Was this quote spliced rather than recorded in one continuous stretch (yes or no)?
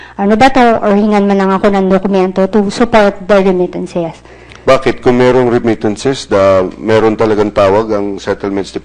yes